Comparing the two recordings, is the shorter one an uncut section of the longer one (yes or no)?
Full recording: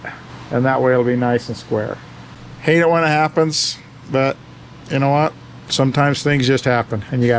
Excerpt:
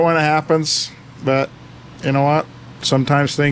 yes